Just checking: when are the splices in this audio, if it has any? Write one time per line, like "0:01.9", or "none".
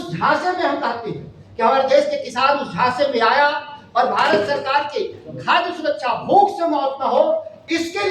none